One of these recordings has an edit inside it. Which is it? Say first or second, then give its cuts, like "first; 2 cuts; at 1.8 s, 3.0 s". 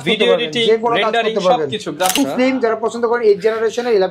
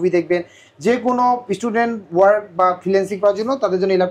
first; 1 cut; at 2.2 s